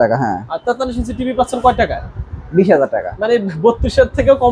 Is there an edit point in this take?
no; 0 cuts

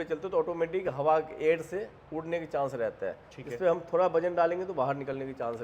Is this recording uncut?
yes; 0 cuts

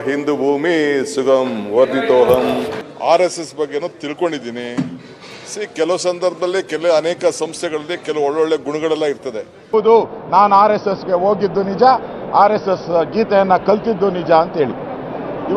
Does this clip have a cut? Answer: yes; 2 cuts; at 2.8 s, 9.7 s

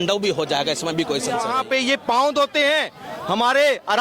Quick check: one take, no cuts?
no; 1 cut; at 1.4 s

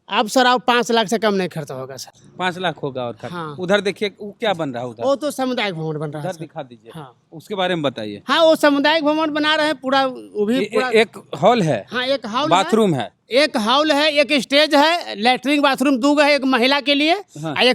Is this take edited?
no; 0 cuts

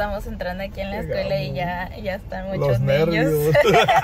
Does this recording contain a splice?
no; 0 cuts

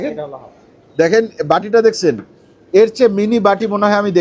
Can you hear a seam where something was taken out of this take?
no; 0 cuts

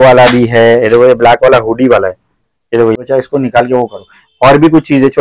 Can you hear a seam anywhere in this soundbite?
yes; 1 cut; at 3.0 s

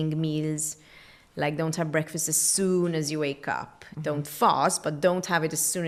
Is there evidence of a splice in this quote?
no; 0 cuts

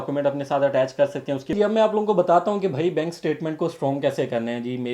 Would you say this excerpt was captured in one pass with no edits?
no; 1 cut; at 1.5 s

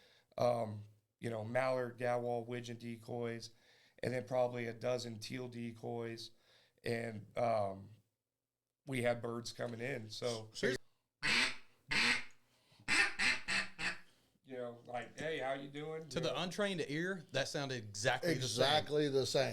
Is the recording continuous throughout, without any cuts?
no; 1 cut; at 10.8 s

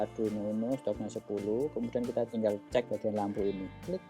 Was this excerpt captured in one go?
no; 1 cut; at 2.5 s

